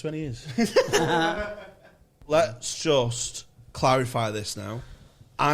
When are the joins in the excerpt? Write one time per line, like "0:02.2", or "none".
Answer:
0:02.1